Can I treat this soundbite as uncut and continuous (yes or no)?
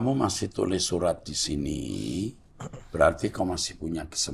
yes